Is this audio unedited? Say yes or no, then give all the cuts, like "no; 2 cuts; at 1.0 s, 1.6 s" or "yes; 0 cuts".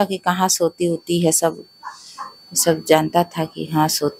yes; 0 cuts